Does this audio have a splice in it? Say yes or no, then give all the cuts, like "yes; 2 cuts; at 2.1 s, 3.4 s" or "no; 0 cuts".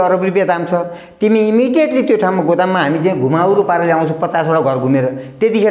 no; 0 cuts